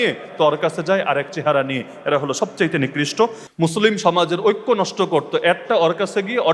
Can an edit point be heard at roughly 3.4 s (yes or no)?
yes